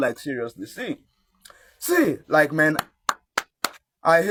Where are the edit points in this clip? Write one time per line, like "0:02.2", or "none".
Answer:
none